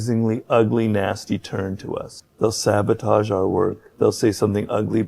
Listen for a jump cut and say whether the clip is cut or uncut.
cut